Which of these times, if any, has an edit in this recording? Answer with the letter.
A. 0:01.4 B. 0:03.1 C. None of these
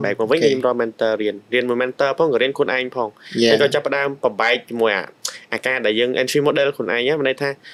C